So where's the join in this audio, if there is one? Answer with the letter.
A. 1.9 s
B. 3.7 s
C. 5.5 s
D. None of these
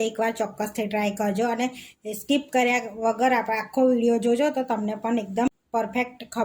C